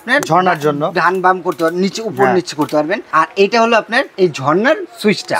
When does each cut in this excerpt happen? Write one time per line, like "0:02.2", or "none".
0:03.0
0:04.1